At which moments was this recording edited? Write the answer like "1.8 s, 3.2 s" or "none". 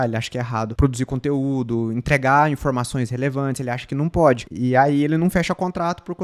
none